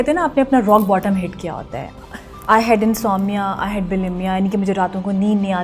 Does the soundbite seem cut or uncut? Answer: uncut